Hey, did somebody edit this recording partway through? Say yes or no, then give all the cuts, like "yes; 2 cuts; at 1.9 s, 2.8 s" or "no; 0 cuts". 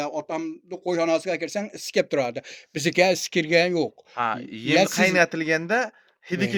no; 0 cuts